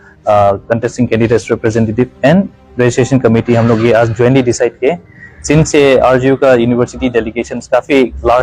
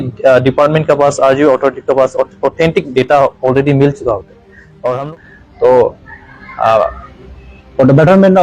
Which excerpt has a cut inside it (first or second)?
second